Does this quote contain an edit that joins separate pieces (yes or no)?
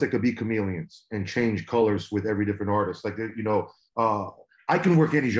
no